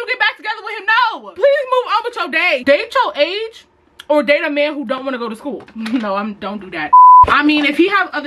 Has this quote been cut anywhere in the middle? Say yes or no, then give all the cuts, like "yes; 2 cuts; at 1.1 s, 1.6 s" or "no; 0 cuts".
no; 0 cuts